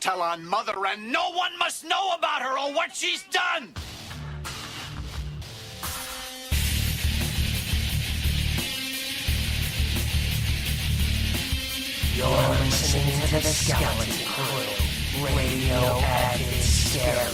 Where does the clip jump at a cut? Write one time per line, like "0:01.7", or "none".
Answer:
none